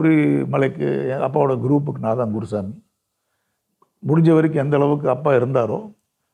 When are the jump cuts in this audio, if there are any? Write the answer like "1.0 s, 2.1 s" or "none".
none